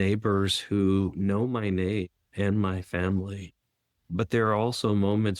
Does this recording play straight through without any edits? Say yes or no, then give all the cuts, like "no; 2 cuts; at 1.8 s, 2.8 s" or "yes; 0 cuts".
yes; 0 cuts